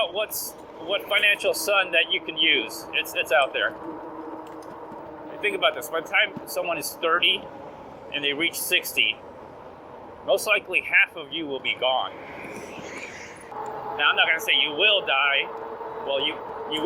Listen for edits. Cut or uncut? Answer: cut